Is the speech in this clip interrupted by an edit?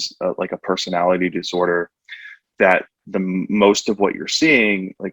no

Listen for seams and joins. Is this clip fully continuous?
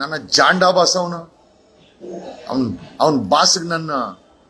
yes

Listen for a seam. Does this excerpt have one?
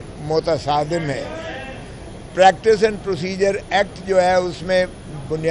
no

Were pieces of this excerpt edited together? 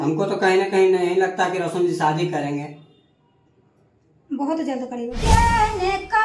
yes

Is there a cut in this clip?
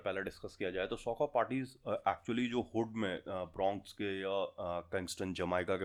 no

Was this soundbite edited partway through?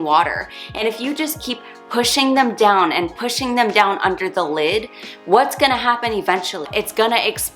yes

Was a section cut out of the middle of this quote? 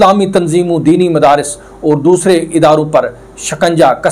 no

